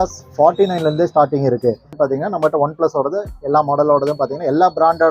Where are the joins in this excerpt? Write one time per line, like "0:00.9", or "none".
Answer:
0:01.9